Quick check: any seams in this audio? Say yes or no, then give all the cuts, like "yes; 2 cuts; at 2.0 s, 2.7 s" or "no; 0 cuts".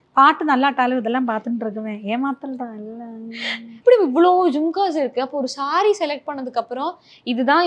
no; 0 cuts